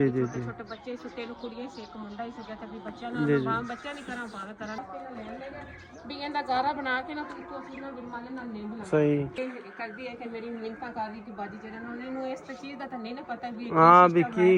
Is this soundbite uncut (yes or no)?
no